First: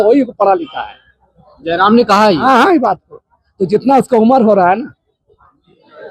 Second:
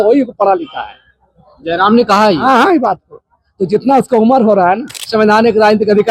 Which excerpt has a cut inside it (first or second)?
second